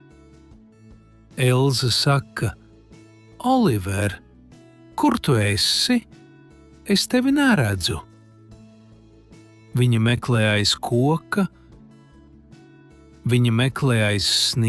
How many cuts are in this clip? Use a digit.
4